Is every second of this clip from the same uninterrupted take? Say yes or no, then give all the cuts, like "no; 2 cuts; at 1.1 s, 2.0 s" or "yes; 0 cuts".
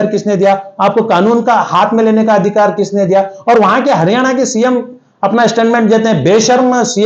yes; 0 cuts